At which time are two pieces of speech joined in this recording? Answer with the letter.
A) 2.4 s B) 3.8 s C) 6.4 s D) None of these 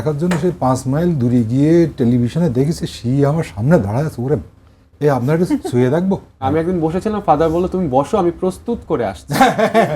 C